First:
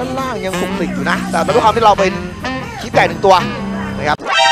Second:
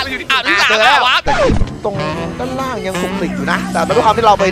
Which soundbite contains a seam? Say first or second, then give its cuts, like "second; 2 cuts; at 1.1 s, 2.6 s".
second; 1 cut; at 1.2 s